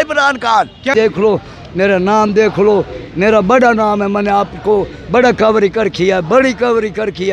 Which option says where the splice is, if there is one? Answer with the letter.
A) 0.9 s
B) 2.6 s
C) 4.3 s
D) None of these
A